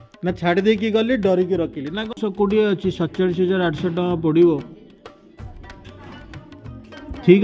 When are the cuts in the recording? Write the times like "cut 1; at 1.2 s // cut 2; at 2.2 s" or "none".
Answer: cut 1; at 2.1 s